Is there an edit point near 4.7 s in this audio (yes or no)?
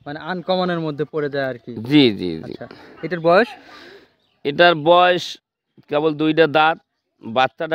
no